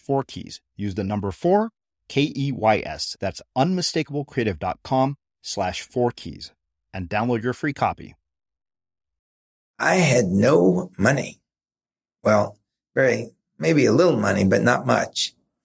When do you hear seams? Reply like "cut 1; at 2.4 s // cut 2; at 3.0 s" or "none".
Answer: cut 1; at 9.8 s